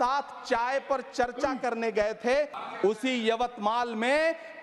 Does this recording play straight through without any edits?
no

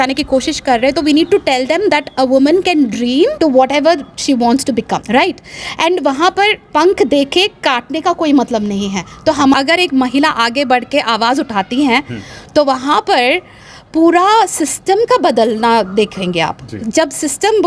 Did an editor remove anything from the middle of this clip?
yes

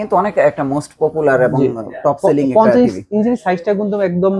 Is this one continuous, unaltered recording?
yes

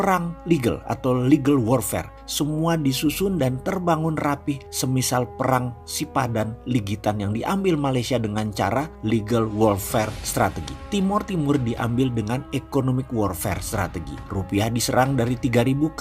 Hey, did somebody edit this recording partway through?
no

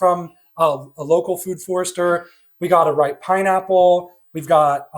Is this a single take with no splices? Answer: yes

